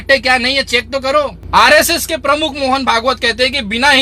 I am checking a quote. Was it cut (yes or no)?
yes